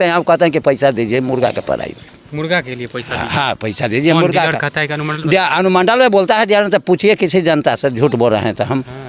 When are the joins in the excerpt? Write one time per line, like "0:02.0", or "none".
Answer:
none